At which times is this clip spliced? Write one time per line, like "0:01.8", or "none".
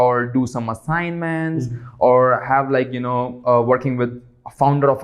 none